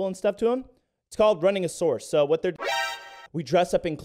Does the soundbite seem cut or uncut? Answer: cut